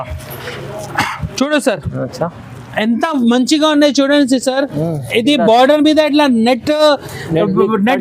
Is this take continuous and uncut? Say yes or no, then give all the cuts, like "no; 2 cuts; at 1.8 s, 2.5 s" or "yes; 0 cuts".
yes; 0 cuts